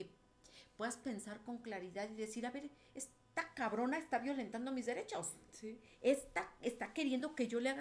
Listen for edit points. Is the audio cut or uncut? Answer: uncut